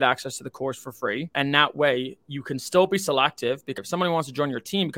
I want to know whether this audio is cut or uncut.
cut